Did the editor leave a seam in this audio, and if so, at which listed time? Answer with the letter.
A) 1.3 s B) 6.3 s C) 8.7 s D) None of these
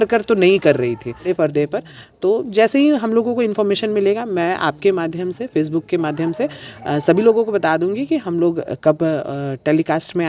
A